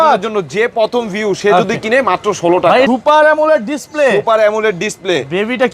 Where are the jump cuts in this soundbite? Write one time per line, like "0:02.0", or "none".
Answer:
0:02.9